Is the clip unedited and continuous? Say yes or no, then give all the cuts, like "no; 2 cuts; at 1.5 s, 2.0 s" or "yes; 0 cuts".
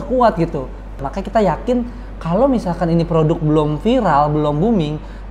no; 1 cut; at 1.1 s